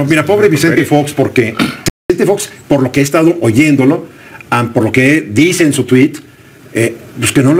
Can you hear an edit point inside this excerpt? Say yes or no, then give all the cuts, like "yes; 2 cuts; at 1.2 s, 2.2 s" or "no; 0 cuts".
yes; 1 cut; at 1.8 s